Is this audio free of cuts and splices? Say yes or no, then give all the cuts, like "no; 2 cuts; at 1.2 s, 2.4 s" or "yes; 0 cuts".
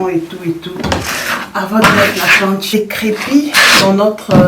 no; 1 cut; at 2.7 s